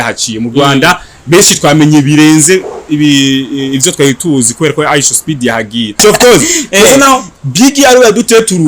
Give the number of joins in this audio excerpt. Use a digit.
1